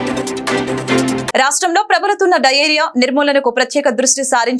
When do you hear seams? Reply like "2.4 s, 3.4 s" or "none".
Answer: 0.9 s